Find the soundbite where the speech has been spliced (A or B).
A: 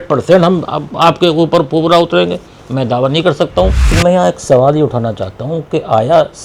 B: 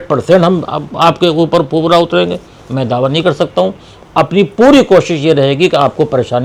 A